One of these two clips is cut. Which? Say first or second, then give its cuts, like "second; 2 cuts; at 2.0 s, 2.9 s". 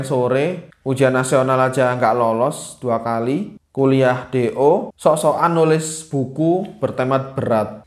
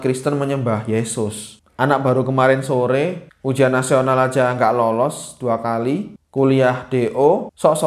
second; 1 cut; at 1.6 s